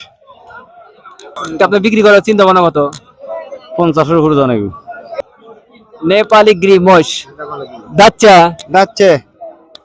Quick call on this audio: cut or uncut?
cut